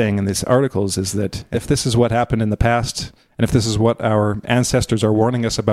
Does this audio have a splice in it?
yes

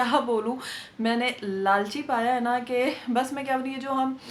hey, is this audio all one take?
yes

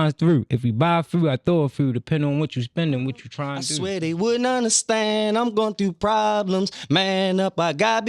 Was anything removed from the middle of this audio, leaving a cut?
yes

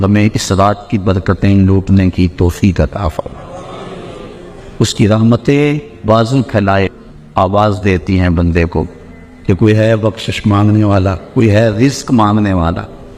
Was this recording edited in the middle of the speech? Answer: no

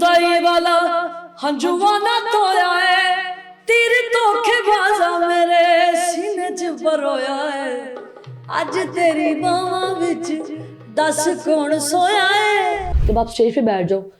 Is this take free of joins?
no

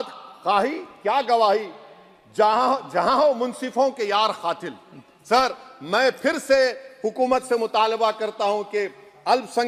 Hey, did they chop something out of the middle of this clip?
no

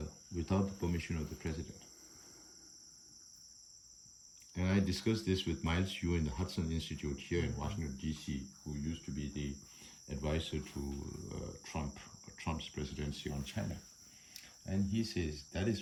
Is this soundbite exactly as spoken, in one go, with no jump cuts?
yes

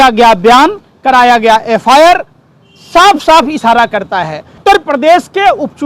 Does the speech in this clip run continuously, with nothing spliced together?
no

